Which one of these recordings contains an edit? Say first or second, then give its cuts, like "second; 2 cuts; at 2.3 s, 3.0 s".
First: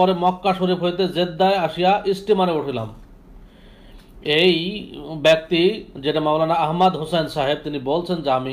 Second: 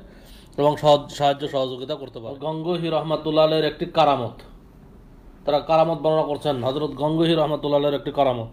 second; 1 cut; at 2.6 s